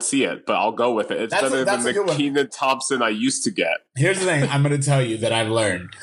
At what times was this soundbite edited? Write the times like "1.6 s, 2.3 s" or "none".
none